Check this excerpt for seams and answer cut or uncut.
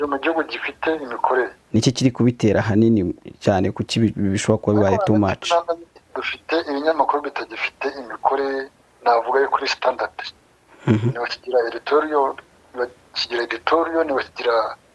cut